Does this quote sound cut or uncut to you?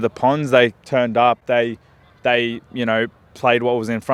uncut